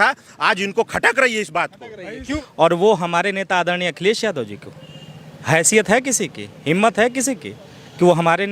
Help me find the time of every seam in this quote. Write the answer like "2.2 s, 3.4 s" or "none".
2.3 s